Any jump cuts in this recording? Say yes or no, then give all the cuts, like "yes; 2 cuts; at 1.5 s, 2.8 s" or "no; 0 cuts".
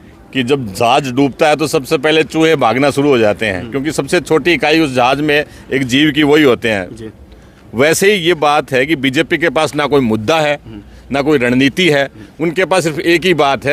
no; 0 cuts